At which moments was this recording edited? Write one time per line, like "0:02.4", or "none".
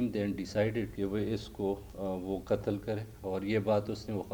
0:00.9